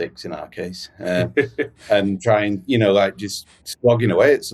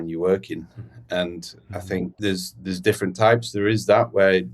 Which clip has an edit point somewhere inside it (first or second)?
second